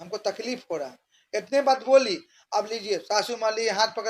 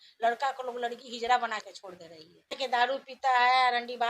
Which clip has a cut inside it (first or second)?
second